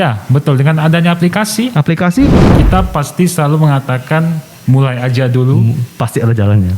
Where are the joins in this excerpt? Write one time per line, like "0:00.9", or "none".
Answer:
0:02.3